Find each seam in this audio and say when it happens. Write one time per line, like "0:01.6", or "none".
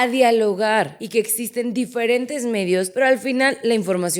0:01.0
0:02.9